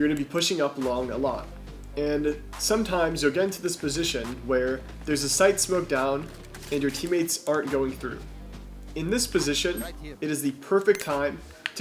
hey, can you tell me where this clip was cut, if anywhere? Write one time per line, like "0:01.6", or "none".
none